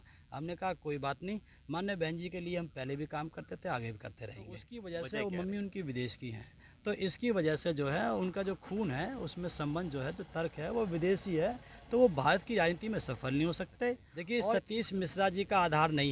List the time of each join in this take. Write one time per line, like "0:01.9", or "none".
0:04.7
0:14.1